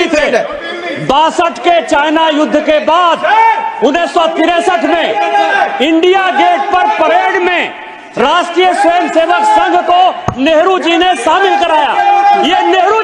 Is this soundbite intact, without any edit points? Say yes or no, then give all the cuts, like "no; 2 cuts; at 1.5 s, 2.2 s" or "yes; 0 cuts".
yes; 0 cuts